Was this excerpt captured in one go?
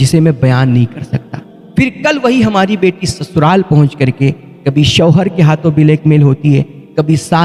yes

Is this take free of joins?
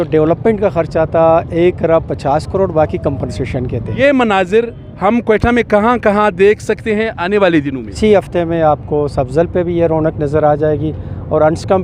no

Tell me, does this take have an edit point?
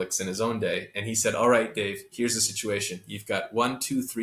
no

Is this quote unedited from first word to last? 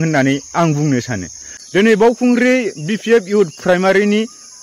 no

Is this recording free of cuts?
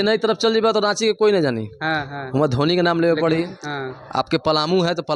yes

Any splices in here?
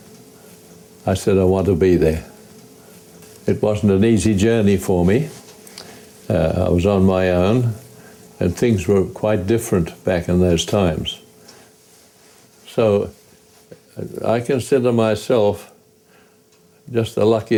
no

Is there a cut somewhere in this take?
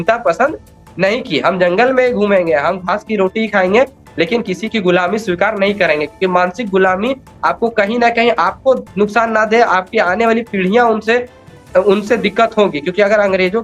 no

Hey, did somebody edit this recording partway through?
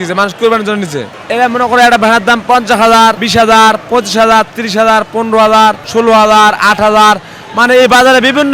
no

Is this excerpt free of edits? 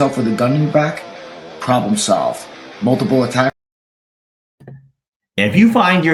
yes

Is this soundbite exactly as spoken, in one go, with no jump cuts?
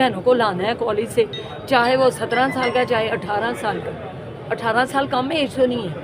yes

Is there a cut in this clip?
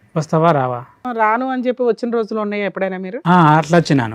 yes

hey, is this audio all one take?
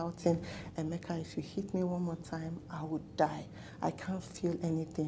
yes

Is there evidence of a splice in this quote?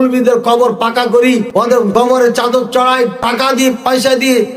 yes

